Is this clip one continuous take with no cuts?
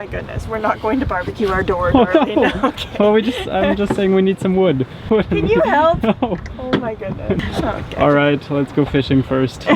no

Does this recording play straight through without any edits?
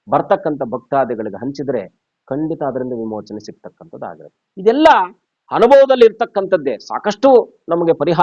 yes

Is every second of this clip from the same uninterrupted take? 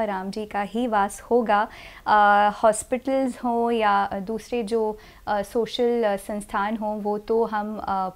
yes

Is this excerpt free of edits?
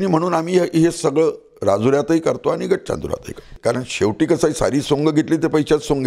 no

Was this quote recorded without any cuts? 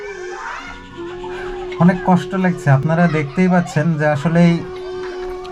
yes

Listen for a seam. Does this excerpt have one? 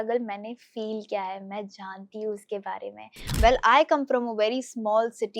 yes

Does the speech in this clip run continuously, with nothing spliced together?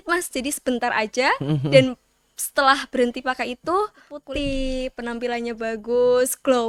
no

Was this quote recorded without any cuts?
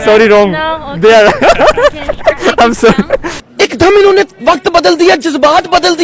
yes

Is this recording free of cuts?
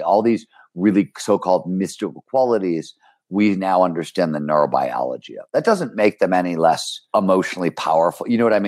no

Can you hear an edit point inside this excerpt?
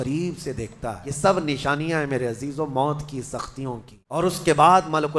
yes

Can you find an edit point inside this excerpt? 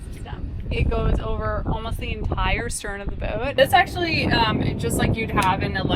yes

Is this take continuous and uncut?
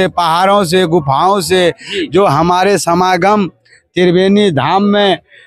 yes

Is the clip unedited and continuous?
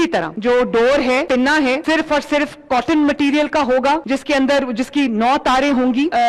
yes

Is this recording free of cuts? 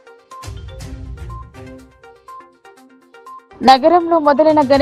no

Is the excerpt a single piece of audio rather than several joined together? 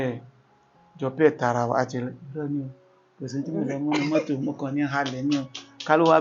yes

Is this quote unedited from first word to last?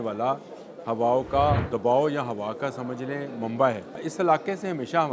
no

